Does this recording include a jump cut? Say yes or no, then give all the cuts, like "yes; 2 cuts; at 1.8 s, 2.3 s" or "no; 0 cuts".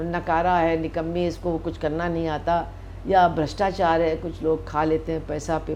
no; 0 cuts